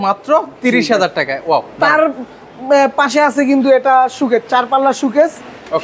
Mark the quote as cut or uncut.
uncut